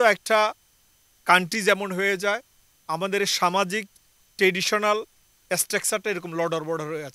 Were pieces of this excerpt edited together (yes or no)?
no